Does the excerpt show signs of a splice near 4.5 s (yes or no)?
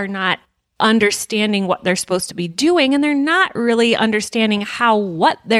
no